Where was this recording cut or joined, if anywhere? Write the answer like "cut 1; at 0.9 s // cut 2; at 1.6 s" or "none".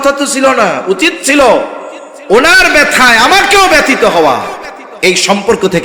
none